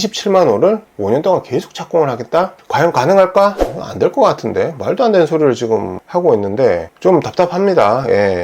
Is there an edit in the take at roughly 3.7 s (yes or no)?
yes